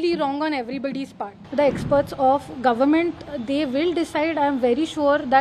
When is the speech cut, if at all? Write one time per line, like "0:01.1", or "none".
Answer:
0:01.3